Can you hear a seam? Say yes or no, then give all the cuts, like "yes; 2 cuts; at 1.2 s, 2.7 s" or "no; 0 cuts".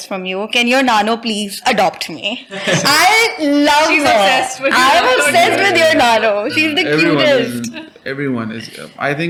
no; 0 cuts